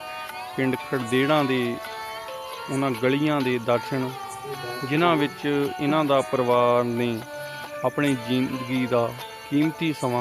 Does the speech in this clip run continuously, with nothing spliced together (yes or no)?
yes